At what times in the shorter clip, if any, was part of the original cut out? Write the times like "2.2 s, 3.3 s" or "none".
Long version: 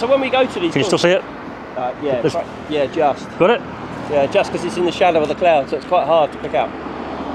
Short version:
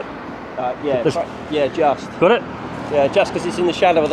none